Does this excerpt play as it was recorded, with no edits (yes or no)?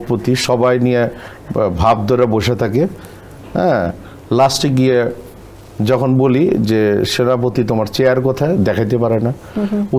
yes